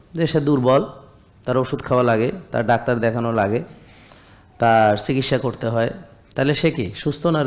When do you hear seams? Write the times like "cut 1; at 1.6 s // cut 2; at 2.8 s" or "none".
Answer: none